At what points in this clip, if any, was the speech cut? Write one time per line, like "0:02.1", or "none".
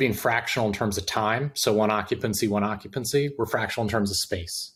none